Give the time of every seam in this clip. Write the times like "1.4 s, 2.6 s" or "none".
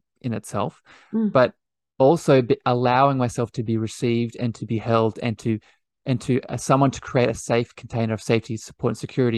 none